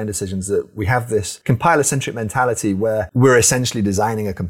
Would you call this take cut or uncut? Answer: cut